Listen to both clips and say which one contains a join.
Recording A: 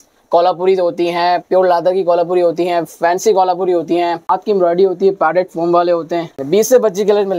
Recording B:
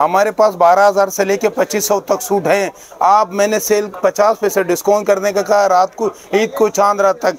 A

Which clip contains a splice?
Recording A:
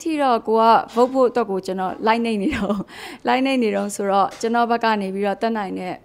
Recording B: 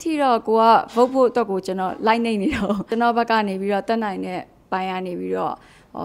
B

